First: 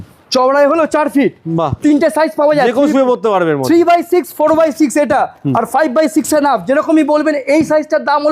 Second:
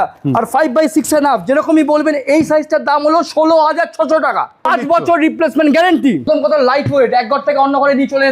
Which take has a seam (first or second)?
second